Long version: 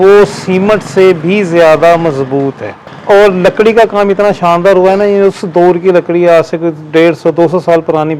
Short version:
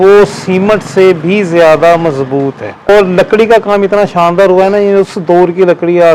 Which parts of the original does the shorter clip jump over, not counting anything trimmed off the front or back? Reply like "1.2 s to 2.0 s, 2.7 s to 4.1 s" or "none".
2.9 s to 3.2 s